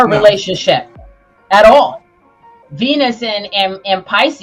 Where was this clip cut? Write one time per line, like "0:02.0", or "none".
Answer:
none

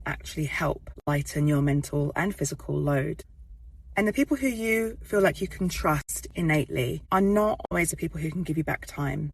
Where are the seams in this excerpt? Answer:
0:00.9
0:07.0

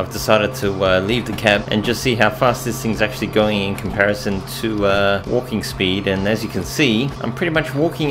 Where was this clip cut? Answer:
0:01.7
0:05.2
0:07.2

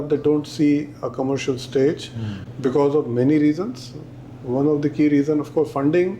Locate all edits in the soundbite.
none

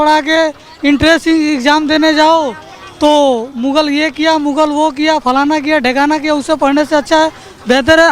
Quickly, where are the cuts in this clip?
none

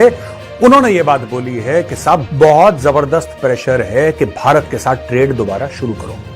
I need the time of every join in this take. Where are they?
0:02.3

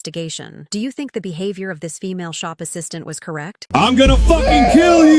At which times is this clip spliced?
0:03.5

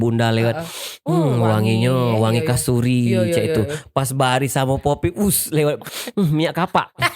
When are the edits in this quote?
0:05.9

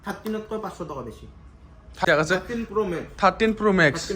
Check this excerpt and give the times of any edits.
0:02.0

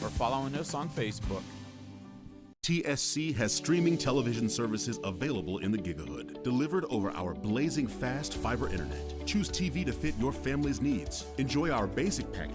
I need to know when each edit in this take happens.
0:02.5

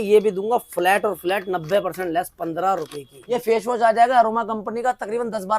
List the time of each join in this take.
0:03.3

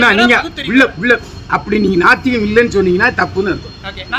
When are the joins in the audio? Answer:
none

